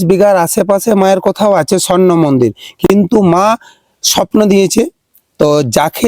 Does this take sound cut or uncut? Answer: cut